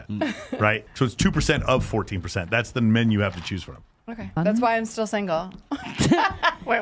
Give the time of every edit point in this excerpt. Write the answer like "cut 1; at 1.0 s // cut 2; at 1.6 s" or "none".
cut 1; at 0.9 s // cut 2; at 4.4 s